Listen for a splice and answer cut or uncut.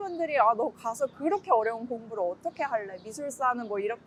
uncut